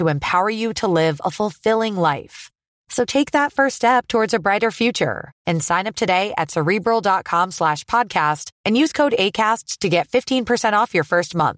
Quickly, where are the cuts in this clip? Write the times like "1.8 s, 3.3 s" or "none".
none

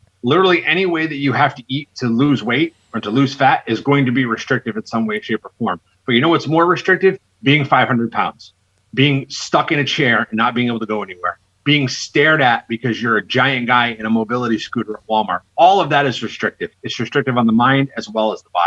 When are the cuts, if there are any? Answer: none

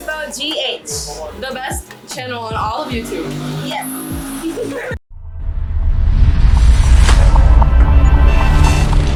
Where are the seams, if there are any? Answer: none

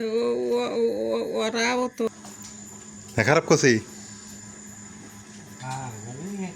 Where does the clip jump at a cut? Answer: 2.1 s

